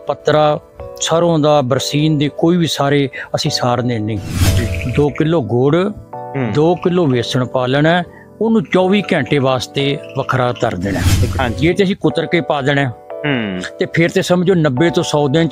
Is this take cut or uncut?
cut